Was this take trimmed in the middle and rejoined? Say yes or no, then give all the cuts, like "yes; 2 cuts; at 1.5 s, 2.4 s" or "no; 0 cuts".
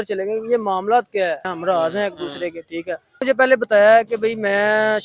yes; 2 cuts; at 1.5 s, 3.2 s